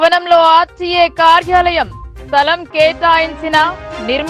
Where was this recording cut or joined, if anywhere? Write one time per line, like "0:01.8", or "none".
none